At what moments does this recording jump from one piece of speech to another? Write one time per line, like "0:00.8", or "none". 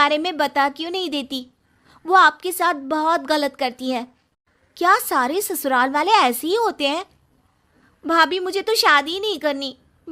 none

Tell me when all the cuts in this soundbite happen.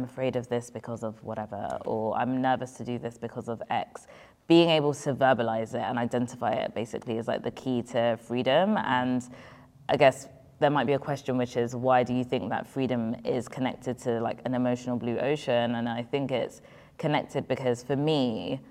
none

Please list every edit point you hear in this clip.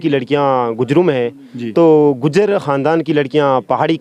none

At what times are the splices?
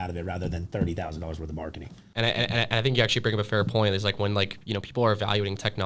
none

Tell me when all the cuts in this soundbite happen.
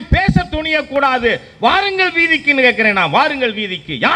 none

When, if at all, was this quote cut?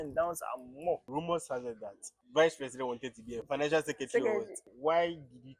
0:01.1
0:02.1
0:03.4
0:04.7

